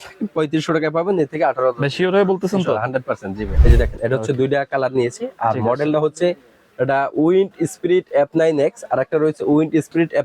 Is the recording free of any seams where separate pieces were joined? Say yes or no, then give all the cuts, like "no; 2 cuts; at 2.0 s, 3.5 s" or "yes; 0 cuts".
no; 1 cut; at 3.5 s